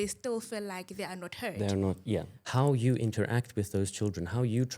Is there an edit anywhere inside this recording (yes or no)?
yes